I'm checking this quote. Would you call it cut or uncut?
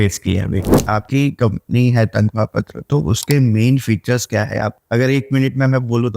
cut